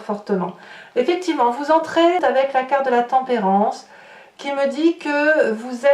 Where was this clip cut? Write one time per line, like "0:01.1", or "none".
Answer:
0:02.2